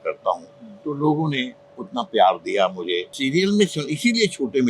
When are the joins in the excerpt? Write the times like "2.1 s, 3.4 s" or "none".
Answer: 3.2 s